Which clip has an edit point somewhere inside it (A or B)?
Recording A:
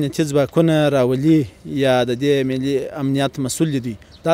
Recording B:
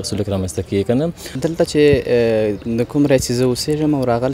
B